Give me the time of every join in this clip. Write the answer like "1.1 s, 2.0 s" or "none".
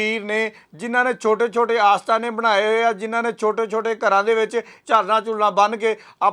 4.7 s